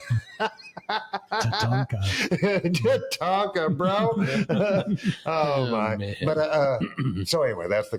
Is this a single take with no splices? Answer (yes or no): yes